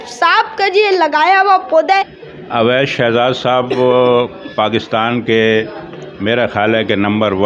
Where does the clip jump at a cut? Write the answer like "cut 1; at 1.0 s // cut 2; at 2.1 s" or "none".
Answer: cut 1; at 2.2 s